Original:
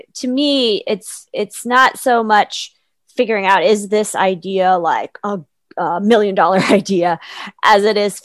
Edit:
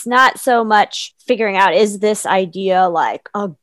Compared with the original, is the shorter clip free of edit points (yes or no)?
no